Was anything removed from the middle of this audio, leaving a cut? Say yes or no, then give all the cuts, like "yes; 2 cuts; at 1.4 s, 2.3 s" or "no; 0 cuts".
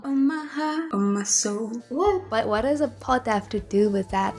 yes; 1 cut; at 1.8 s